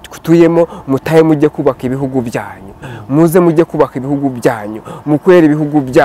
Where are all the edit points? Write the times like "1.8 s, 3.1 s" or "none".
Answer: none